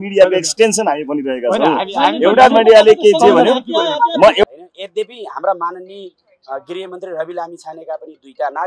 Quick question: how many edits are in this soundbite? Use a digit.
1